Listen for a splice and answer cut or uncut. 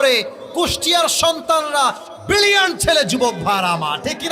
uncut